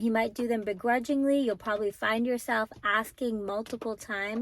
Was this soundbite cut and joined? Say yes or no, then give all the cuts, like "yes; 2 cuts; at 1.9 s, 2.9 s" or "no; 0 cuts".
no; 0 cuts